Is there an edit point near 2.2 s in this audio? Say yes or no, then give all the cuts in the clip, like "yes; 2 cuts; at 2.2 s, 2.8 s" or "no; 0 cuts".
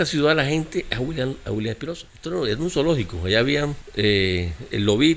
yes; 1 cut; at 2.2 s